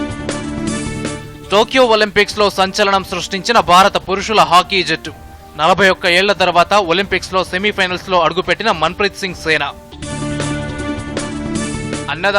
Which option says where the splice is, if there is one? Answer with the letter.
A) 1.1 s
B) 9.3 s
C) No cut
A